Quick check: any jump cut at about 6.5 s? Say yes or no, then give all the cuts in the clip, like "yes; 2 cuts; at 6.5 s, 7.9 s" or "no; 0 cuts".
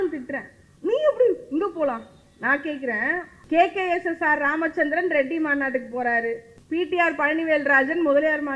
yes; 2 cuts; at 3.4 s, 6.5 s